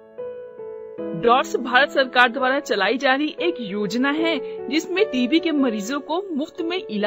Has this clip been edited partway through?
yes; 1 cut; at 1.0 s

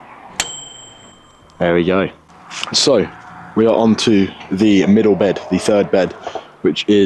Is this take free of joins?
yes; 0 cuts

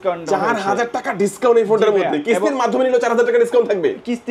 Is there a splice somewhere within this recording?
no; 0 cuts

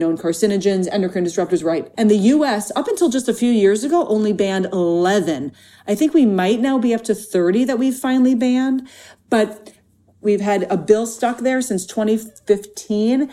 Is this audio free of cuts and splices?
no; 2 cuts; at 1.9 s, 10.2 s

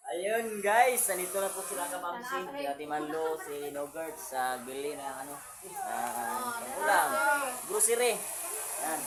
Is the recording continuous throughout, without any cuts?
yes; 0 cuts

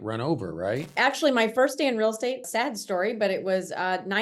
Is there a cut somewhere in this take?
yes; 2 cuts; at 0.9 s, 2.5 s

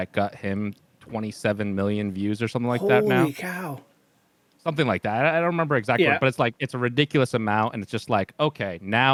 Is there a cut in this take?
no; 0 cuts

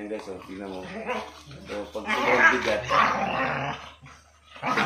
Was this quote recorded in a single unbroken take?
yes; 0 cuts

